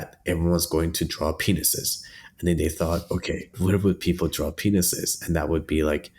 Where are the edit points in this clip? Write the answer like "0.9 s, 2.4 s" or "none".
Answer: 3.5 s